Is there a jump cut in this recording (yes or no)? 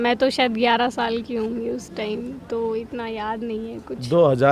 no